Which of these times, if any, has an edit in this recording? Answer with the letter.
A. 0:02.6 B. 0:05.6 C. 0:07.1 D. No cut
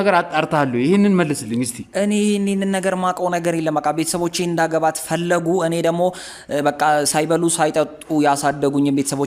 D